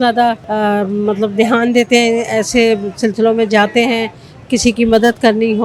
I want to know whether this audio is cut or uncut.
uncut